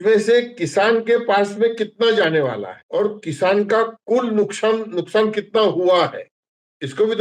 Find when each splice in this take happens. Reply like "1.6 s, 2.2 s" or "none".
2.7 s